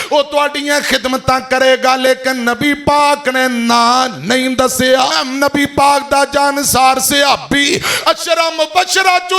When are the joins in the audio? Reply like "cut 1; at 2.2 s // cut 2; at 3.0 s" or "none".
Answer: cut 1; at 5.1 s